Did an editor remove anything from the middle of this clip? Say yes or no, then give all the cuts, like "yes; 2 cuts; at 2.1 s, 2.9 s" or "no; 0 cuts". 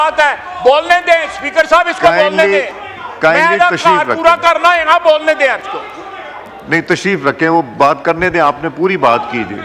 no; 0 cuts